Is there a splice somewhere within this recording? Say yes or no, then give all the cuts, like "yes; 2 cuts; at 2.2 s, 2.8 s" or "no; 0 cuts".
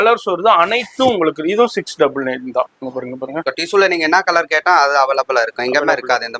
yes; 1 cut; at 3.5 s